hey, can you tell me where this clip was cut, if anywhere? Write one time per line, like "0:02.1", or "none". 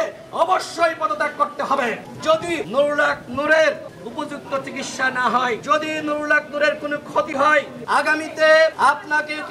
0:02.3
0:04.0
0:05.6
0:07.8
0:08.7